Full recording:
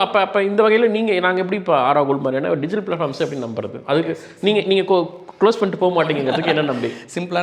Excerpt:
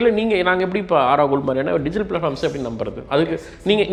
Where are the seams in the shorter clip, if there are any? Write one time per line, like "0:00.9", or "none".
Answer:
none